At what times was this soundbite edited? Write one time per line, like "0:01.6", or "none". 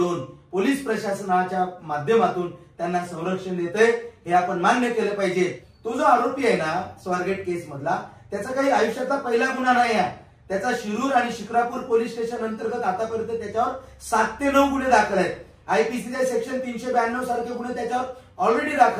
0:05.7

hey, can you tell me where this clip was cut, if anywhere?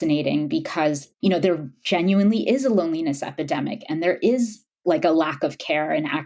0:01.0

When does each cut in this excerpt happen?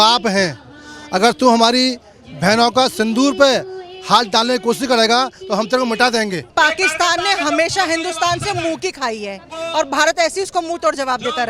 0:06.5
0:09.5

